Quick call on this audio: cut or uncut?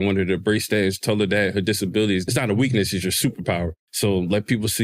cut